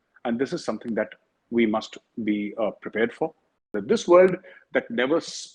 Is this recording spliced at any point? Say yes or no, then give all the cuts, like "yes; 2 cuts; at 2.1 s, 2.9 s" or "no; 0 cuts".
yes; 1 cut; at 3.7 s